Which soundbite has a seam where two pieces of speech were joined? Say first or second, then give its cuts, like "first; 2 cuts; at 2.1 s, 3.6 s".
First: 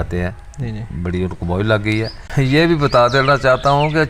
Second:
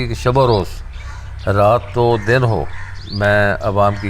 first; 1 cut; at 2.2 s